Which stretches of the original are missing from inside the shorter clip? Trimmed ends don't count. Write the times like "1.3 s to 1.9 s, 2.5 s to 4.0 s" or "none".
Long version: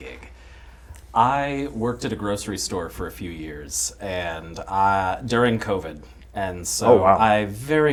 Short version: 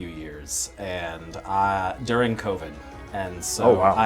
none